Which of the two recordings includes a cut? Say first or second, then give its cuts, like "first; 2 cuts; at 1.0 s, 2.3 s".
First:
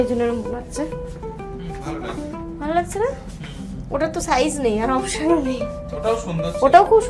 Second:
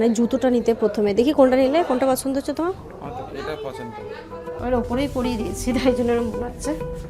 second; 1 cut; at 4.5 s